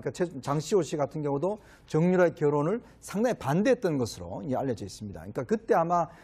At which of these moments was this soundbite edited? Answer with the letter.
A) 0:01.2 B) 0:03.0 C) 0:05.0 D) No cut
B